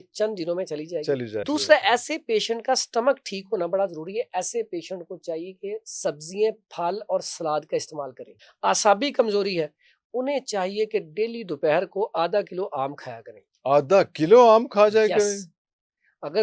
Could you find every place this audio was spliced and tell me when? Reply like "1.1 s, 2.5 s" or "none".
1.4 s, 8.4 s